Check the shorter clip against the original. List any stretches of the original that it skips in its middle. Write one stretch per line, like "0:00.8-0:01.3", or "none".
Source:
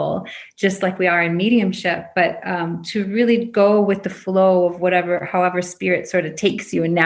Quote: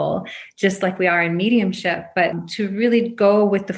0:02.4-0:02.8